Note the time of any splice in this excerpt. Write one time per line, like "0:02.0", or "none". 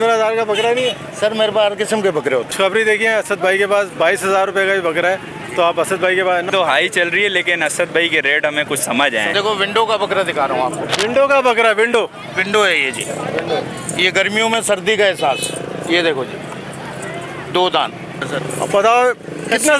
0:02.5
0:06.5
0:09.3
0:18.3